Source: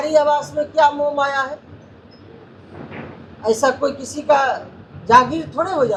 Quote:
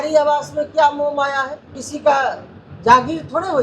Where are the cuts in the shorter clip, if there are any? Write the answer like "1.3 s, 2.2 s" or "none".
1.8 s